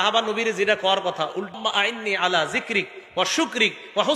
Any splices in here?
yes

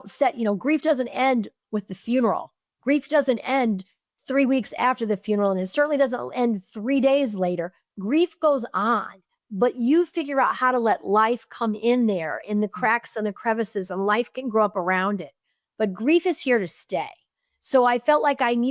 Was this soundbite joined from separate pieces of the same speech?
no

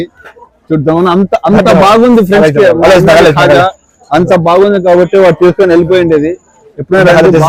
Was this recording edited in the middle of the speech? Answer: no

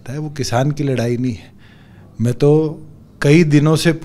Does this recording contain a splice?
no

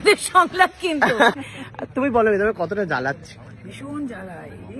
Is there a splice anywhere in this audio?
yes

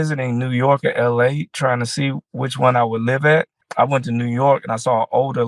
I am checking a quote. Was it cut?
yes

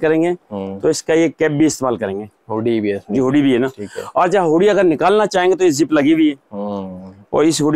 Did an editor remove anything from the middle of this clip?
no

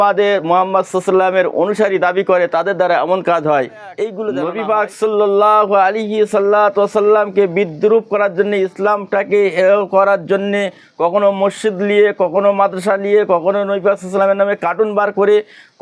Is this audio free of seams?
no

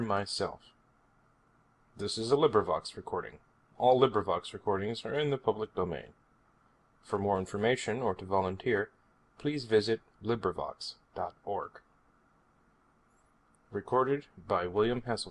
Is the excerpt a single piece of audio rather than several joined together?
yes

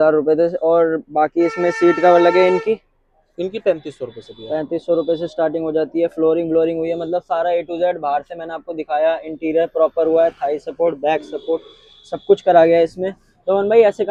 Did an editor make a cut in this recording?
no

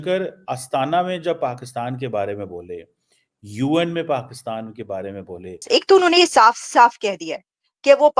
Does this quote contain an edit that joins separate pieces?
yes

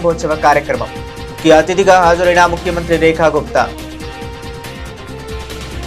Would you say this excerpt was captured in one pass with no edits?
no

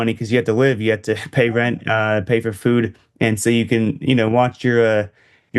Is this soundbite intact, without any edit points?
yes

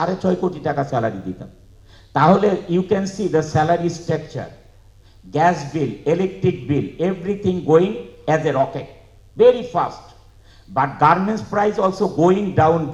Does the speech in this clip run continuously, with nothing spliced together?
yes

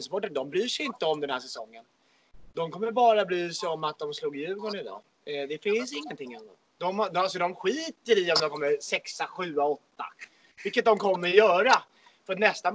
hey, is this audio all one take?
yes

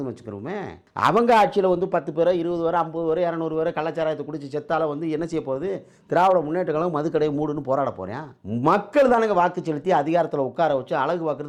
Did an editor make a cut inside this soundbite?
no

